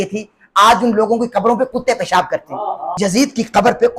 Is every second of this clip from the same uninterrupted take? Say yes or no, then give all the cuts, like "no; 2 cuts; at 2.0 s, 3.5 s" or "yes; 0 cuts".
no; 1 cut; at 2.9 s